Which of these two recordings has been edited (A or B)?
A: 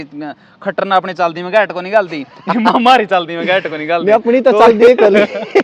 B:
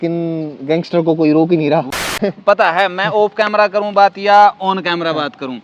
B